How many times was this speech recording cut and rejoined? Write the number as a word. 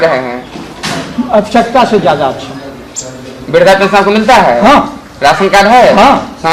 zero